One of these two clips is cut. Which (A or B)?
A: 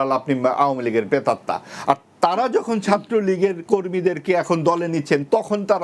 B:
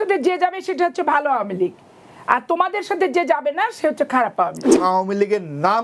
B